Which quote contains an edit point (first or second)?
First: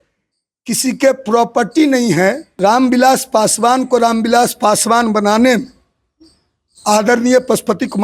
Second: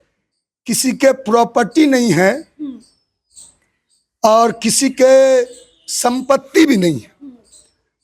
first